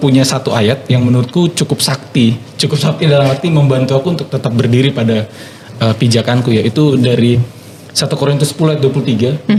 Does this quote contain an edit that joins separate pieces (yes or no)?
no